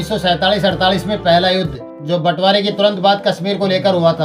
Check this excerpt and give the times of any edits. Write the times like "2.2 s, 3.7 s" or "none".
none